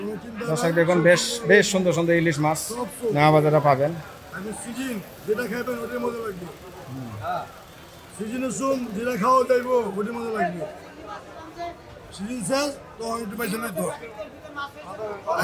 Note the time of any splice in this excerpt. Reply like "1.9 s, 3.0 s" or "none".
none